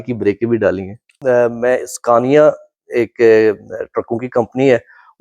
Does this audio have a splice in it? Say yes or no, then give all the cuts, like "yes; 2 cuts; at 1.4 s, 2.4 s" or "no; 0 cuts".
yes; 1 cut; at 1.2 s